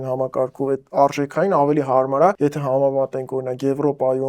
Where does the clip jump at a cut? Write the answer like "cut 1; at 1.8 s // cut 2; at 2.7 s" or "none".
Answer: cut 1; at 2.4 s